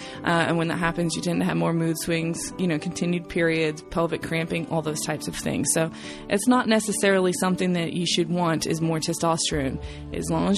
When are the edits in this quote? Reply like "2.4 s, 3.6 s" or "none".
none